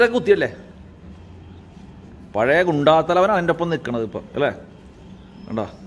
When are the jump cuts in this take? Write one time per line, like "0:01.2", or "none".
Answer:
none